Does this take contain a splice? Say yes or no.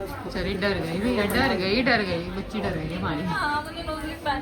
no